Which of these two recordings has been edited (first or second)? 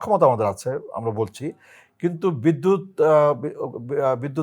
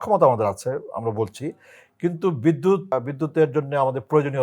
second